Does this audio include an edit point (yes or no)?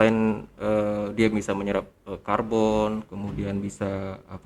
no